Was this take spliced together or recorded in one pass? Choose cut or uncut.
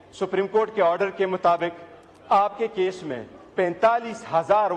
uncut